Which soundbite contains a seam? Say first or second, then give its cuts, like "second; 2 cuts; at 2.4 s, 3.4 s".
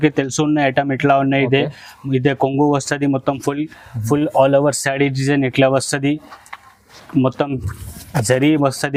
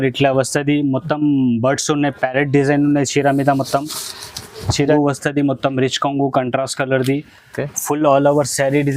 second; 1 cut; at 4.9 s